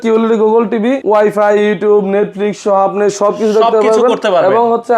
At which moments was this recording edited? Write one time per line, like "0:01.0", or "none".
0:01.0